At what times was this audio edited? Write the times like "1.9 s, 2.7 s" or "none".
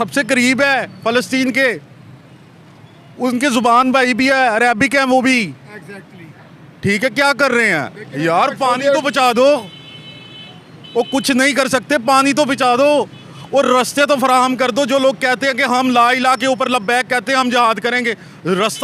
none